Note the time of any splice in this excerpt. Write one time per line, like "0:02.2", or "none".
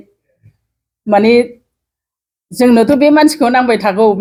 none